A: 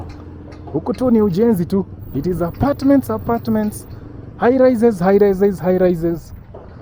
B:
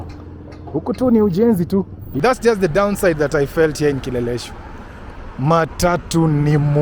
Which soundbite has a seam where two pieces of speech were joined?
B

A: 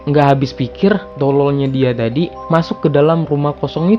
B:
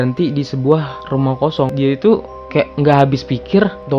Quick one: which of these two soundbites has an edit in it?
B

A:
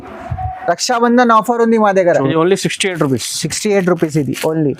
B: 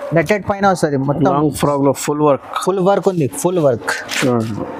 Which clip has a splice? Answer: A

